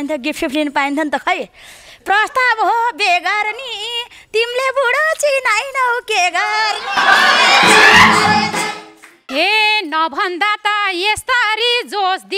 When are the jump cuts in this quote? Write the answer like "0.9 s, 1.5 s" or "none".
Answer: 9.3 s